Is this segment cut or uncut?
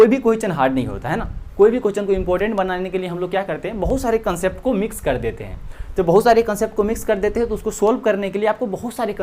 uncut